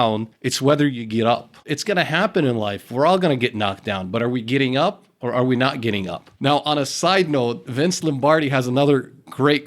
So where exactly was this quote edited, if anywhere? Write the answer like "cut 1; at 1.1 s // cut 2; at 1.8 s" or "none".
cut 1; at 1.7 s